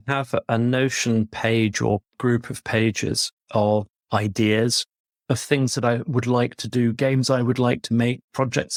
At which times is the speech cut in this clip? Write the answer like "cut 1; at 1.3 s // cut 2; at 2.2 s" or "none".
none